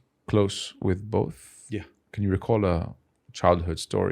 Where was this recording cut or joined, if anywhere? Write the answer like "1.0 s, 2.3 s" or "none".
2.0 s